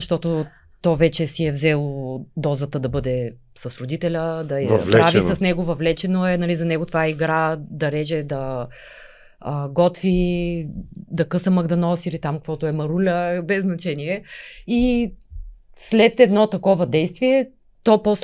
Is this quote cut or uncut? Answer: uncut